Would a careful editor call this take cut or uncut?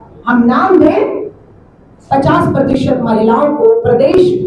uncut